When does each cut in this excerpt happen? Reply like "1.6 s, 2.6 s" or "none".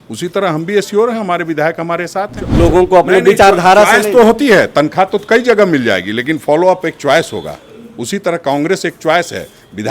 2.4 s